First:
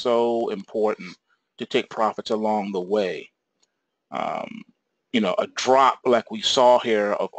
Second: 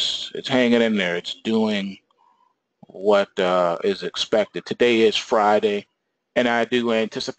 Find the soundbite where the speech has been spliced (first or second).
first